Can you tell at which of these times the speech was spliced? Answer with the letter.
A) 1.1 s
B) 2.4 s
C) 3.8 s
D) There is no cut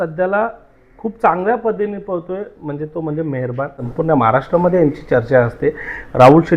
C